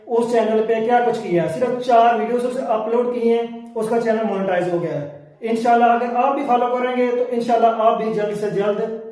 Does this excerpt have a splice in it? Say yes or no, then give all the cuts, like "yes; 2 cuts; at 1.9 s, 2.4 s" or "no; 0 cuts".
no; 0 cuts